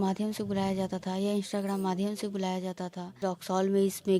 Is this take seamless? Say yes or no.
no